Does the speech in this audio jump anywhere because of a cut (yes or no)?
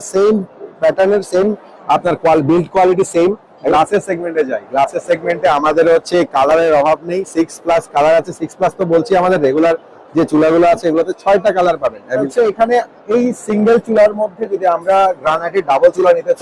yes